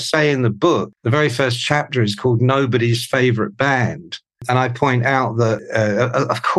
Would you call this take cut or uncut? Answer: cut